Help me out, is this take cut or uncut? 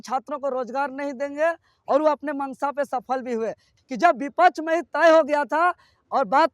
cut